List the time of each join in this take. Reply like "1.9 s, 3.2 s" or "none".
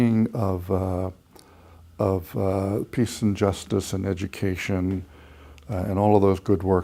none